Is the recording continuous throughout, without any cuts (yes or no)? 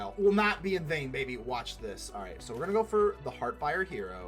yes